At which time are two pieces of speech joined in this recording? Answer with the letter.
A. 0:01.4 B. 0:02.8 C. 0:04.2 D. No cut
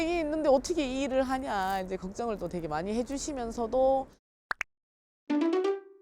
C